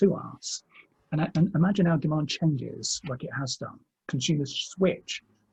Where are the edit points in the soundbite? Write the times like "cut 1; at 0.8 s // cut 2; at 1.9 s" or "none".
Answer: none